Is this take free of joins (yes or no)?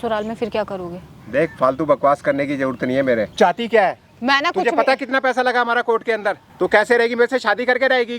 no